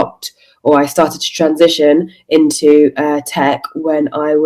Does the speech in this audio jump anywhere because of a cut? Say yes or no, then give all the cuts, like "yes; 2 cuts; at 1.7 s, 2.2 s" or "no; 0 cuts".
no; 0 cuts